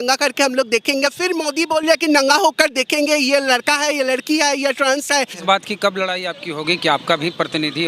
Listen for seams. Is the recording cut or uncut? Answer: cut